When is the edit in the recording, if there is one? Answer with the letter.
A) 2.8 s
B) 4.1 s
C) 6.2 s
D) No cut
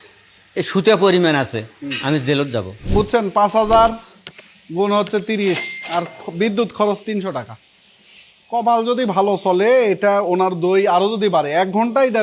A